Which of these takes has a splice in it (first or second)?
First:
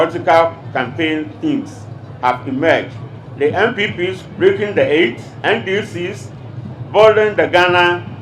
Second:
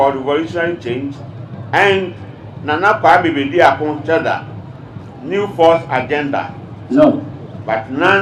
first